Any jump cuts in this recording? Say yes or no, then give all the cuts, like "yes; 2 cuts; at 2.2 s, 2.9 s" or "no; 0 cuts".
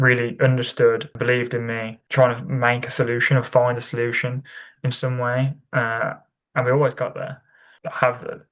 yes; 1 cut; at 7.6 s